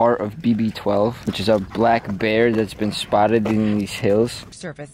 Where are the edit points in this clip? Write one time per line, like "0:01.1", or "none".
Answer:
0:01.3